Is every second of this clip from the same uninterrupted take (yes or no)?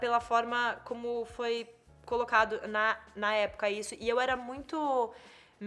yes